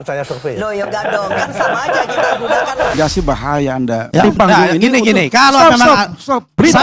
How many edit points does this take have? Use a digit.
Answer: 1